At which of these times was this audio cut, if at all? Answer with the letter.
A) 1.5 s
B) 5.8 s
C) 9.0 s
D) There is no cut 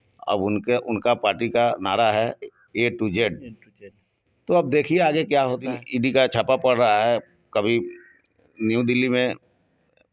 B